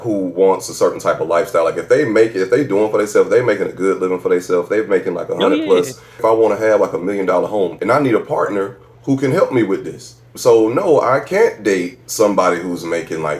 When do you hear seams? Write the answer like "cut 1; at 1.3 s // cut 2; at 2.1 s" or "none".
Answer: cut 1; at 6.2 s // cut 2; at 7.8 s // cut 3; at 8.9 s // cut 4; at 10.2 s